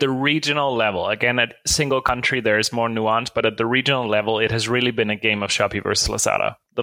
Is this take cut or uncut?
uncut